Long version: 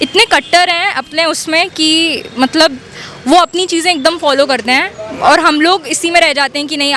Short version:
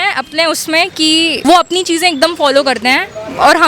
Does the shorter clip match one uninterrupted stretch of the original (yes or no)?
no